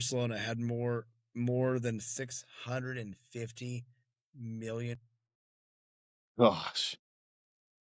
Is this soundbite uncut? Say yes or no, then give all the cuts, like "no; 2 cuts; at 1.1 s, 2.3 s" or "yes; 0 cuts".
yes; 0 cuts